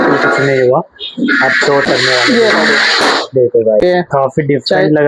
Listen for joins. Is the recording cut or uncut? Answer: cut